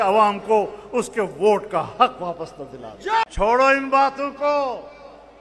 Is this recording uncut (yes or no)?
yes